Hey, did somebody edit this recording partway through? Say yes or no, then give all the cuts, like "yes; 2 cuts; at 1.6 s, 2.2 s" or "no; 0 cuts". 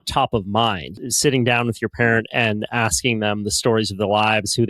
yes; 1 cut; at 0.9 s